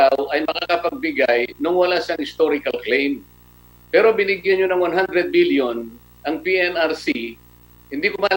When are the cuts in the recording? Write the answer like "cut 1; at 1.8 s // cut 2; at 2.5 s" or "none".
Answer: none